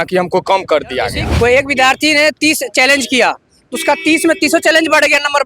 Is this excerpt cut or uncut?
cut